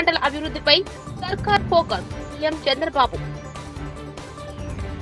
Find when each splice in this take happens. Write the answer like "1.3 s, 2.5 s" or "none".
none